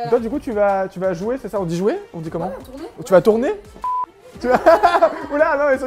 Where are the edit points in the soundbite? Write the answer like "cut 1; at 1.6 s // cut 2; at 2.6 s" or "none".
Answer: none